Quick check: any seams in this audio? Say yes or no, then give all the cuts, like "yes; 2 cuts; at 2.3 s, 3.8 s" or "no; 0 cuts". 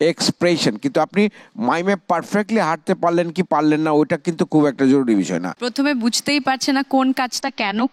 yes; 1 cut; at 5.6 s